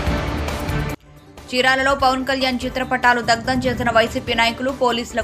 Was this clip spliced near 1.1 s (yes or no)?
yes